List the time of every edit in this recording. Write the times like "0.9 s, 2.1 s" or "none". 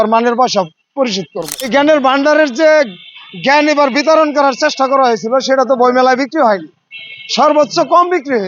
1.7 s